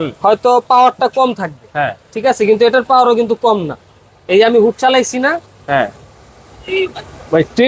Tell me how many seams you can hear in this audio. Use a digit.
0